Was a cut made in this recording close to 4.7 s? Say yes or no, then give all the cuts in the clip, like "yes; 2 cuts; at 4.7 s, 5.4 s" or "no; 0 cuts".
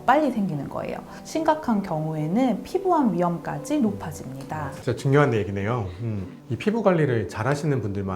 yes; 1 cut; at 4.7 s